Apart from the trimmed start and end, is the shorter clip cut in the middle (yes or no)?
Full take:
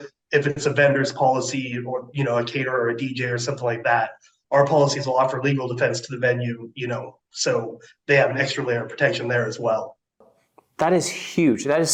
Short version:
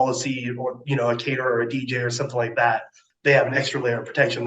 yes